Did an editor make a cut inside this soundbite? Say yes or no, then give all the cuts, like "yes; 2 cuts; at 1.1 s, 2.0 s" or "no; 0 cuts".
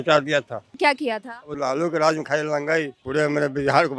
no; 0 cuts